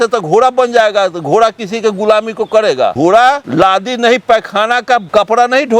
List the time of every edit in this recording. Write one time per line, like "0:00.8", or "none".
0:03.3
0:05.1